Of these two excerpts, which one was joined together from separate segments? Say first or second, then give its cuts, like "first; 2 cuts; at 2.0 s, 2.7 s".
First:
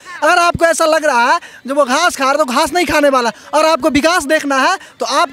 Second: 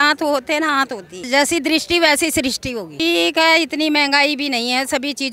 second; 2 cuts; at 1.2 s, 2.9 s